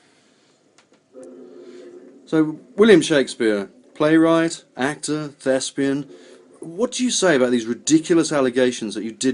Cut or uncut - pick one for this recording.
cut